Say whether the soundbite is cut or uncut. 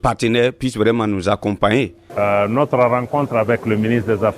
cut